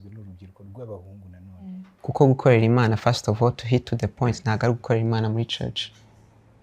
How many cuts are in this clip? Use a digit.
1